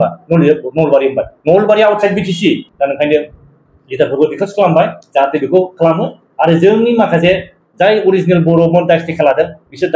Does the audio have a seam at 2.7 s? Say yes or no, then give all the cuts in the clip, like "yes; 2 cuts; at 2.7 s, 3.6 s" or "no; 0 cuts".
yes; 1 cut; at 2.7 s